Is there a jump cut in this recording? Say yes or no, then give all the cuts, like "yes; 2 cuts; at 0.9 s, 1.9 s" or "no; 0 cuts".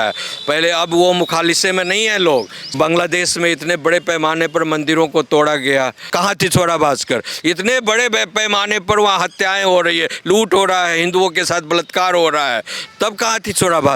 yes; 2 cuts; at 2.7 s, 6.1 s